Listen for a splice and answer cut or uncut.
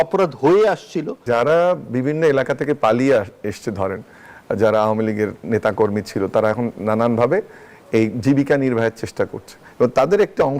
cut